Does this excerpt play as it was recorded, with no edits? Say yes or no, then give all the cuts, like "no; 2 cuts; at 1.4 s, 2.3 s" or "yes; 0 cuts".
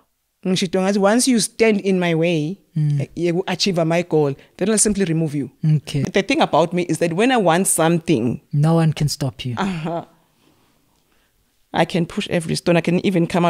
no; 1 cut; at 6.0 s